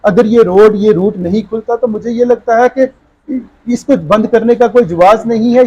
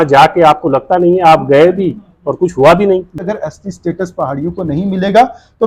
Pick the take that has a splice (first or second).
second